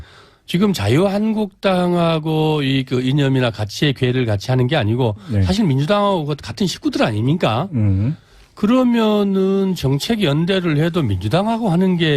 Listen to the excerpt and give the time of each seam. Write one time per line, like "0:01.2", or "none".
0:05.4